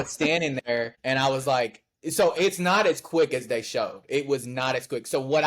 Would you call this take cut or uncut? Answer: cut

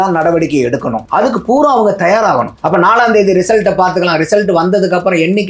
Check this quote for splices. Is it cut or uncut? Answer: cut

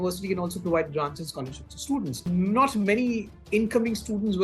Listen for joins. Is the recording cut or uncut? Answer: cut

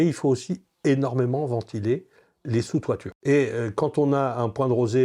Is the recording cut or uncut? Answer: cut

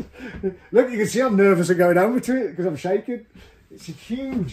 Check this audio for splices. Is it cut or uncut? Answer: uncut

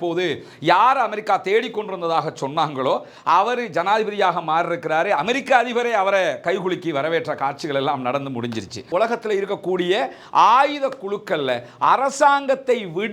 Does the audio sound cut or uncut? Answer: cut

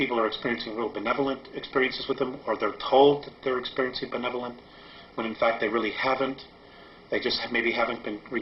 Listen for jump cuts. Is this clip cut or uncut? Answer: cut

